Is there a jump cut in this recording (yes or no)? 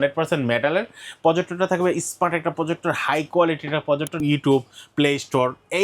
yes